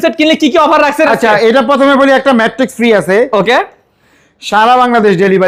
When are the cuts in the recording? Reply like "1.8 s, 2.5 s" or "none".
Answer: none